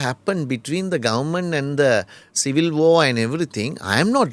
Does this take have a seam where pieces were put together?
no; 0 cuts

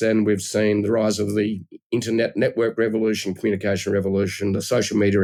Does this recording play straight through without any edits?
yes; 0 cuts

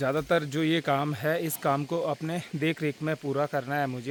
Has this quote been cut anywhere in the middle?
no; 0 cuts

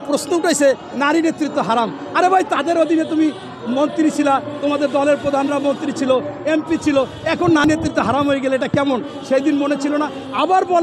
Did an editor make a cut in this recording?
no; 0 cuts

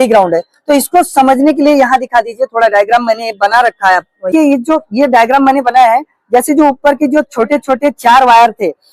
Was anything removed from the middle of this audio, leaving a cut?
yes; 1 cut; at 4.3 s

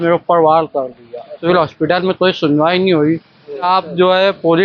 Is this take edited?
yes; 2 cuts; at 1.4 s, 3.6 s

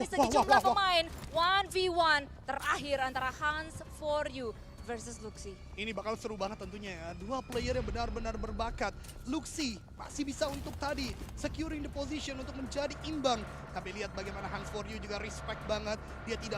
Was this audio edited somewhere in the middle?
no; 0 cuts

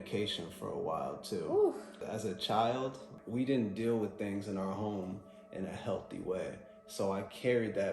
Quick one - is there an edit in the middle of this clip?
yes; 2 cuts; at 2.0 s, 3.1 s

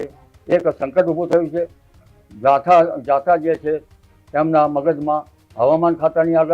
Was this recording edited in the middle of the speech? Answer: no; 0 cuts

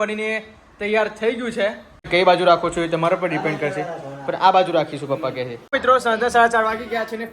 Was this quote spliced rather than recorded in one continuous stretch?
yes; 2 cuts; at 2.1 s, 5.7 s

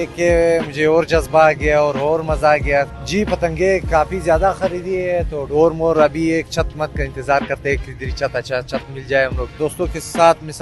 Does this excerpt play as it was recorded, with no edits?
no; 2 cuts; at 2.9 s, 9.5 s

